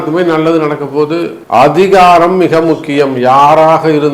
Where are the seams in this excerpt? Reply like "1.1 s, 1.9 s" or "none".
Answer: 1.4 s